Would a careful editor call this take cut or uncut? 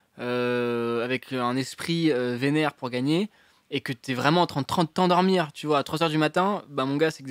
uncut